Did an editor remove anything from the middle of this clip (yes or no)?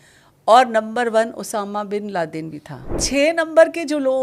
yes